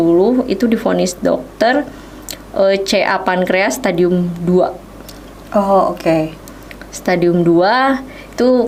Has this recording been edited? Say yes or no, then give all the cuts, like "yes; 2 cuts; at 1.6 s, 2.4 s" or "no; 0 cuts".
no; 0 cuts